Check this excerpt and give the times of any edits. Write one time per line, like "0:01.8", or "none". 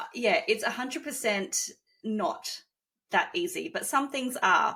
none